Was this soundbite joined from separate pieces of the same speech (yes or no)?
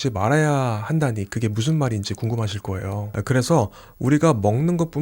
yes